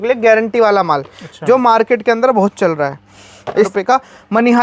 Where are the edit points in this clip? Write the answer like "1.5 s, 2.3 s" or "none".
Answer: 3.7 s